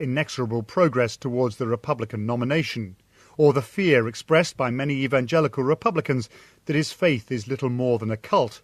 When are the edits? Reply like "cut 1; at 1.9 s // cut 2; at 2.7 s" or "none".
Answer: cut 1; at 3.1 s